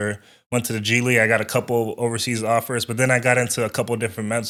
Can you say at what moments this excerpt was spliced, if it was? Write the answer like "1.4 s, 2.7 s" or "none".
none